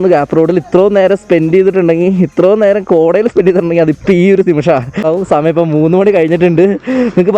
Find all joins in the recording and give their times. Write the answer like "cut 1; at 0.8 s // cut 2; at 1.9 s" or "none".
none